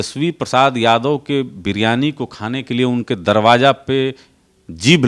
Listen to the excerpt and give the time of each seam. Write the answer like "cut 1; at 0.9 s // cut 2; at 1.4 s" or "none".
none